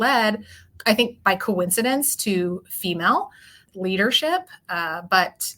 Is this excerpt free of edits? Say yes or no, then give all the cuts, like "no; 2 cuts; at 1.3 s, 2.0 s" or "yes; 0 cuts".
no; 1 cut; at 3.6 s